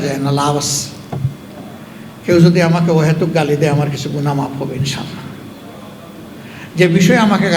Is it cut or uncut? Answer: uncut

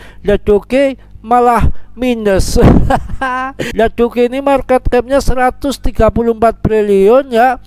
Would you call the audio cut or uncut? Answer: cut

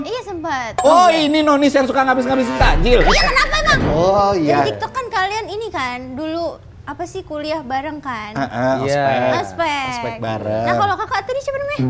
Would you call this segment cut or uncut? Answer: cut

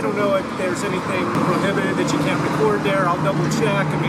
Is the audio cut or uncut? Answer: cut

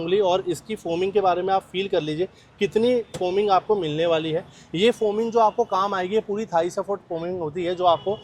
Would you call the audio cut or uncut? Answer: uncut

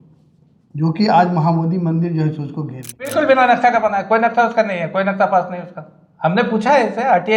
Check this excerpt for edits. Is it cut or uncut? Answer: cut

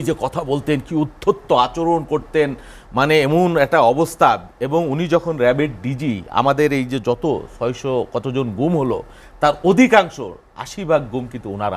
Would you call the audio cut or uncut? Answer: uncut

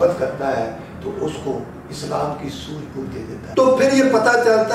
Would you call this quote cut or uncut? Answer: cut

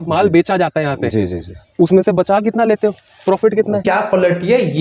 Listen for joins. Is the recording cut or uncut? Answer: cut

